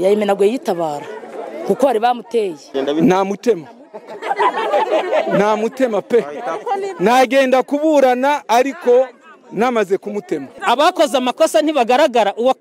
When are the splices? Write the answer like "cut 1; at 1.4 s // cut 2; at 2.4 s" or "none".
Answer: cut 1; at 2.7 s // cut 2; at 10.5 s